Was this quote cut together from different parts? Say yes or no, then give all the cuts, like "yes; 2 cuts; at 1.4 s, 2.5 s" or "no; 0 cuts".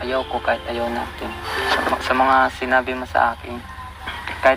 yes; 1 cut; at 1.4 s